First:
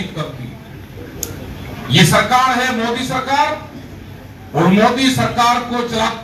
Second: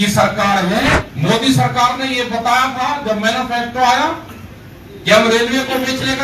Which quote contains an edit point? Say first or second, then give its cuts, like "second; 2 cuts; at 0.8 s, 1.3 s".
second; 1 cut; at 1.1 s